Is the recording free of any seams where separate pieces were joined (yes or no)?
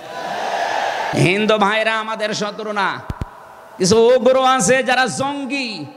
no